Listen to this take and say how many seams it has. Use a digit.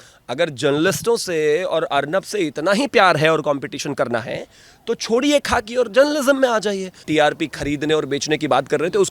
1